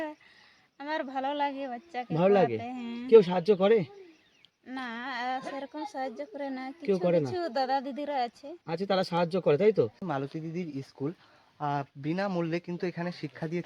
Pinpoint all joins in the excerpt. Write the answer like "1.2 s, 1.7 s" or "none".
10.0 s